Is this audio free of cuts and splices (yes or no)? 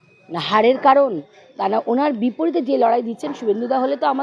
yes